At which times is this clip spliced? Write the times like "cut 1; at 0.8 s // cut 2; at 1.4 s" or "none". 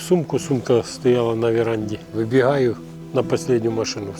cut 1; at 2.0 s